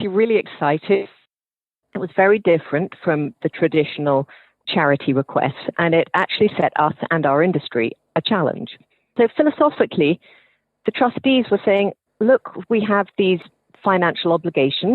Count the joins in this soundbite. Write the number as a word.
one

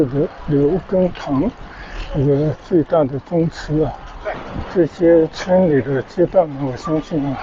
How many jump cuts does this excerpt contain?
one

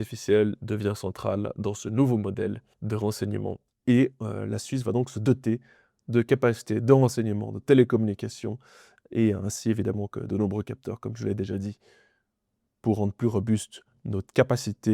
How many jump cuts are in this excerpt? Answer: two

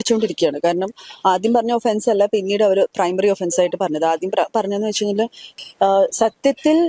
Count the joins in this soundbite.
one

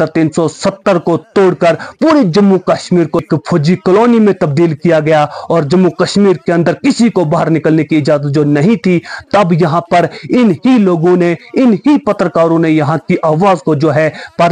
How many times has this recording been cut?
one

